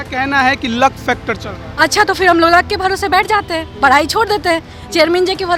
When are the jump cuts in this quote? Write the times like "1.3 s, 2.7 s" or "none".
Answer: none